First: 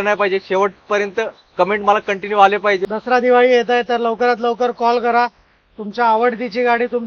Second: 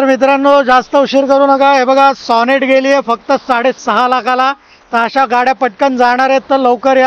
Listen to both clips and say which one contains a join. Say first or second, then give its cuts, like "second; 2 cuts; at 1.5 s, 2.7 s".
first; 1 cut; at 2.9 s